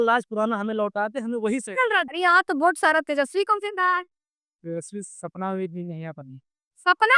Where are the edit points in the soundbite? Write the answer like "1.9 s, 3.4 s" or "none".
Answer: 2.1 s